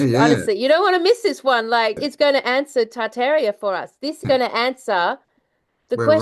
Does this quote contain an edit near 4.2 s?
yes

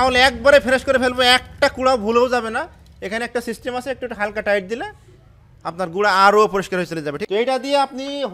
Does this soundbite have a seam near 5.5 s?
no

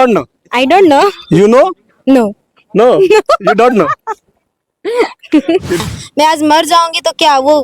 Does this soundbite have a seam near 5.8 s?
yes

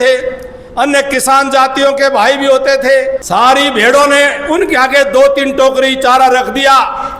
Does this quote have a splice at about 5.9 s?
no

